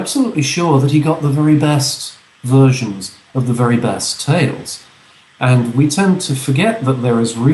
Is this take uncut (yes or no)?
yes